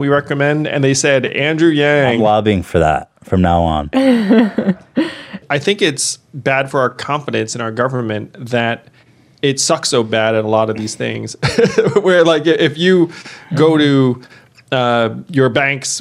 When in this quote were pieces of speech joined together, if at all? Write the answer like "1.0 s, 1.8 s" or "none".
2.2 s, 5.4 s